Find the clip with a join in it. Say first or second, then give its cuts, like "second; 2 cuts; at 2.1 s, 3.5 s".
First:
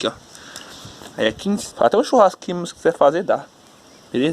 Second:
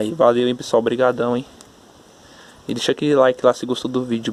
first; 1 cut; at 1.7 s